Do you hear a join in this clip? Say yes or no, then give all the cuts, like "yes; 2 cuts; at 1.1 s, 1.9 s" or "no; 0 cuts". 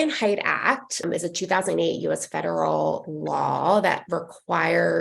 yes; 1 cut; at 1.0 s